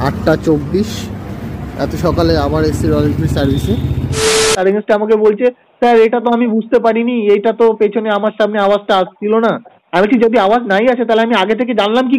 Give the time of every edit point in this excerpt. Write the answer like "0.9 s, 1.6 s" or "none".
4.6 s